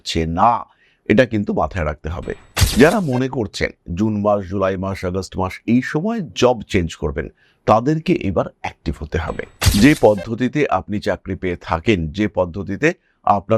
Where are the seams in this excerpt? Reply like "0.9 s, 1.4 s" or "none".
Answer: 2.5 s

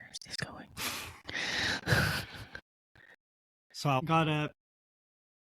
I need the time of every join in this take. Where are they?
4.0 s

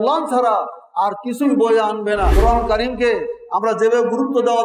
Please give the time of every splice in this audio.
2.3 s

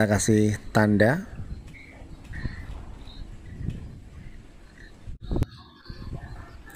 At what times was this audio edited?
5.2 s

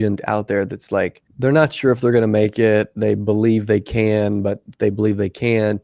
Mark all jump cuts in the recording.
1.2 s

